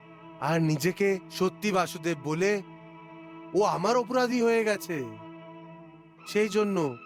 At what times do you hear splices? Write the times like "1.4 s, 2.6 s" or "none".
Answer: none

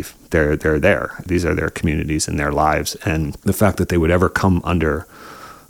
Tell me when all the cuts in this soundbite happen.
1.2 s

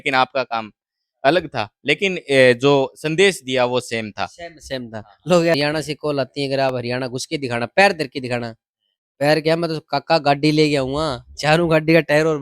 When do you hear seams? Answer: 5.5 s

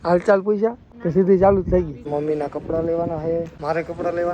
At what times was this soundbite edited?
0.9 s, 2.1 s, 3.5 s

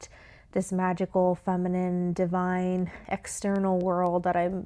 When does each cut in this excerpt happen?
none

